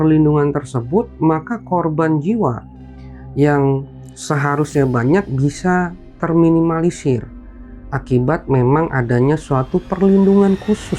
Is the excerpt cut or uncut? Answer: uncut